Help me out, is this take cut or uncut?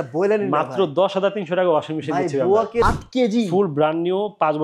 cut